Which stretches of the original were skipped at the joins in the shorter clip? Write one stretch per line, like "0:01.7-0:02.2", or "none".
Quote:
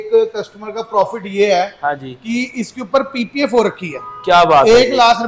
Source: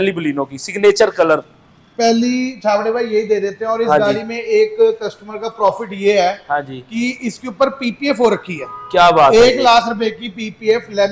none